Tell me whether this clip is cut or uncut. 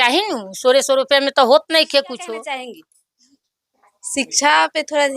cut